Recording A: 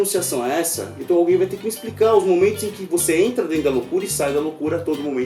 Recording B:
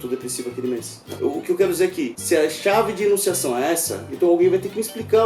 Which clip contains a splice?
B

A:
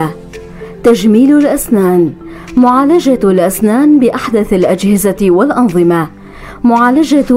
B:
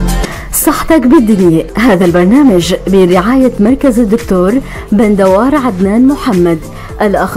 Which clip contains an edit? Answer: B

